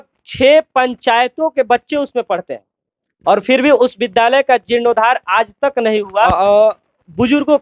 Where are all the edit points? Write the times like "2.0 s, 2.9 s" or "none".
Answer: 6.1 s